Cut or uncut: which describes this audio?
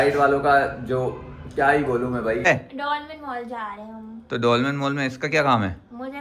cut